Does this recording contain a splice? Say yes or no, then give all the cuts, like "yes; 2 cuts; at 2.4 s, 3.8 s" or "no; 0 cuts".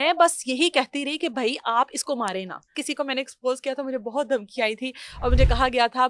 yes; 1 cut; at 2.8 s